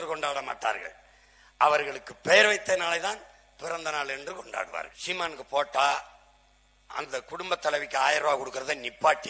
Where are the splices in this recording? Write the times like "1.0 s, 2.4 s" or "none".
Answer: 5.0 s